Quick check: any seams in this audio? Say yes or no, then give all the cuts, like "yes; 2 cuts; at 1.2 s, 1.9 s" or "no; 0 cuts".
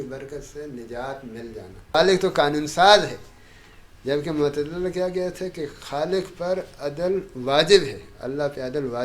yes; 1 cut; at 1.8 s